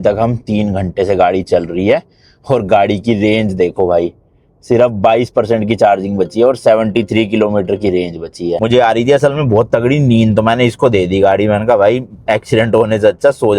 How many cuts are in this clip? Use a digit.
1